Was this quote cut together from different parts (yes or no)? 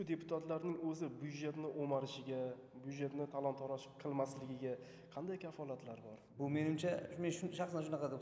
yes